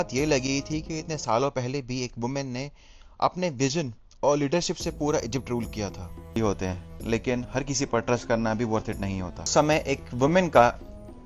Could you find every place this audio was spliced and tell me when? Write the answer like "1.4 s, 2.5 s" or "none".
6.4 s, 9.5 s